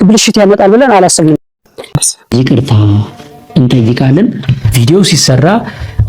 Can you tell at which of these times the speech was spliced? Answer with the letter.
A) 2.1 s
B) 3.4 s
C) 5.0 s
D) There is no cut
A